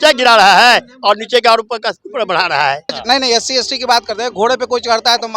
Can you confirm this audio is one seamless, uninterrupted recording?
no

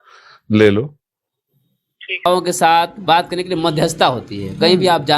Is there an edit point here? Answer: yes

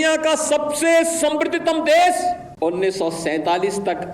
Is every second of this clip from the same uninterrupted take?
no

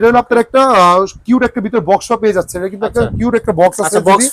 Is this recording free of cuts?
yes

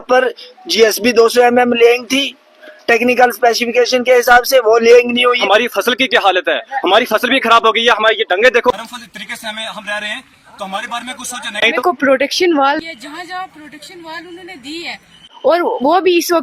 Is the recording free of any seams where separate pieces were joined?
no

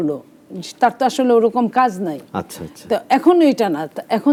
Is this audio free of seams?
yes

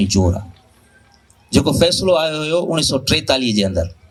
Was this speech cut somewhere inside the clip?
no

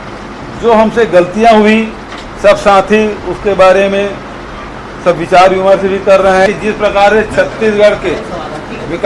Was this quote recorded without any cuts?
no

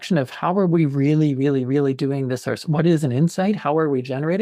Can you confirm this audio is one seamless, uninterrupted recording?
yes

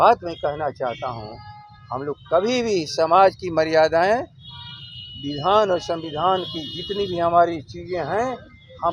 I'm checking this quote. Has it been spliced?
no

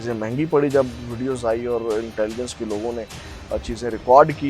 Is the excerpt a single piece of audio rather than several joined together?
yes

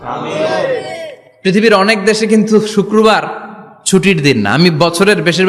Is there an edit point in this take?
no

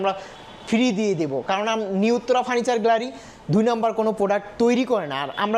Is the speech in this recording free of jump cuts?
yes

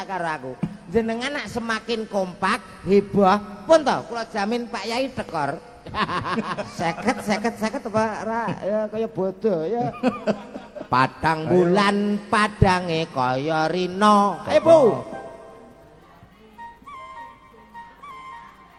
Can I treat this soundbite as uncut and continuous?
yes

